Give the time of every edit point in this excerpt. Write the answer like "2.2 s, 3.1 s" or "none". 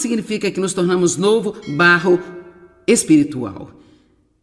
none